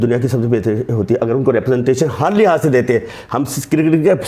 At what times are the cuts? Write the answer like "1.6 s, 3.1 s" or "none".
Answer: none